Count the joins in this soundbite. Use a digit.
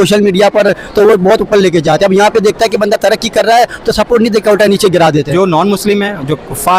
1